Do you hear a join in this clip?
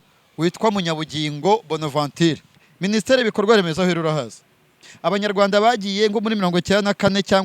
yes; 1 cut; at 2.5 s

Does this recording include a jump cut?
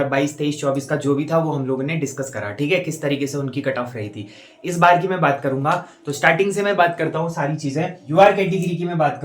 yes; 1 cut; at 8.0 s

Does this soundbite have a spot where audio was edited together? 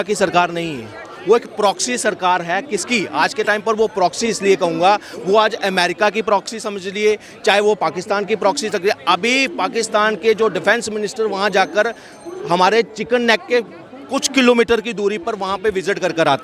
no; 0 cuts

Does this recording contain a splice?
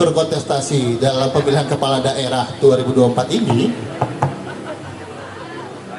no; 0 cuts

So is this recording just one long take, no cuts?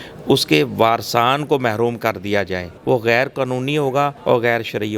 no; 2 cuts; at 2.7 s, 4.2 s

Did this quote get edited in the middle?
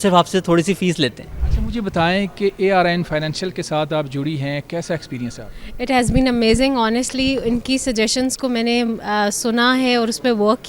no; 0 cuts

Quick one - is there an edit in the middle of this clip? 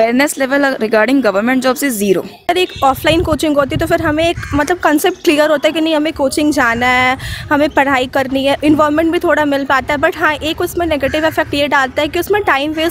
yes; 1 cut; at 2.5 s

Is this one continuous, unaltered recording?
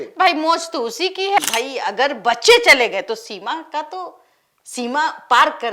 no; 1 cut; at 1.4 s

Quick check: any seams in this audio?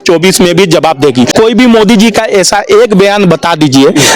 yes; 1 cut; at 1.3 s

